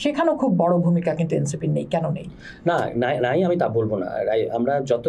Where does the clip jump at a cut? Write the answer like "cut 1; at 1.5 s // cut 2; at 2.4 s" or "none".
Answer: none